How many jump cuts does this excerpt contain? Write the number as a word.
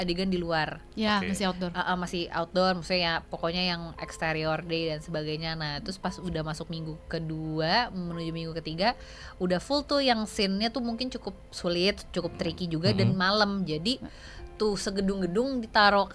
zero